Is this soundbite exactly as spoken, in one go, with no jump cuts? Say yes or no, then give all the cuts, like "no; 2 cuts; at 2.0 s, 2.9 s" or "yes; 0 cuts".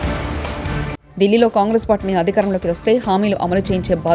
no; 1 cut; at 0.9 s